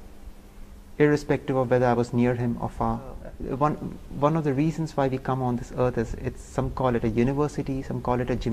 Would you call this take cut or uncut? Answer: cut